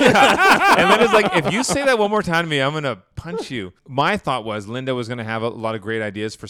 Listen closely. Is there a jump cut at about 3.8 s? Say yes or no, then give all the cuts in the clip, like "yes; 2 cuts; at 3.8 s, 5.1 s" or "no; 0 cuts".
yes; 1 cut; at 3.8 s